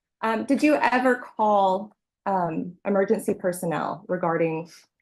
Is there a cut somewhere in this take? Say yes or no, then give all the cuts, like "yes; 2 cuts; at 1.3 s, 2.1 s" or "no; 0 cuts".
no; 0 cuts